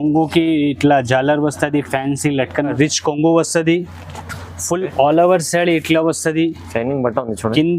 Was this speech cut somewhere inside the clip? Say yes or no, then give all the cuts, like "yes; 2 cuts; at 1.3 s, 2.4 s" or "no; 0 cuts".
yes; 1 cut; at 2.7 s